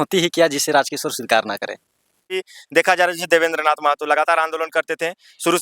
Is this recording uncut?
no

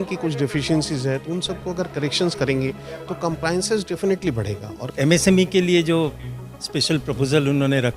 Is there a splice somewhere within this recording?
yes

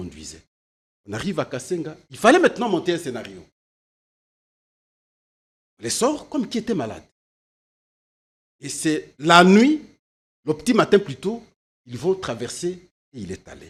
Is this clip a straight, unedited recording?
yes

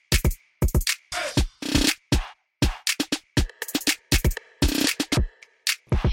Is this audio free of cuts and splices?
no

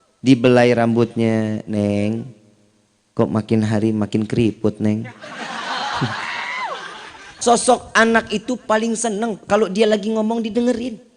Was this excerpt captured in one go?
no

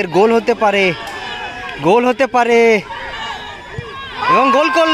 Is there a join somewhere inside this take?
no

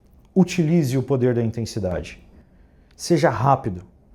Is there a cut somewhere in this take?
no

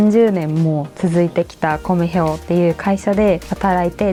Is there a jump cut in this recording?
no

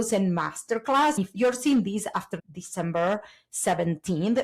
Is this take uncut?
no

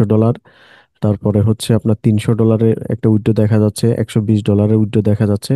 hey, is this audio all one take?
yes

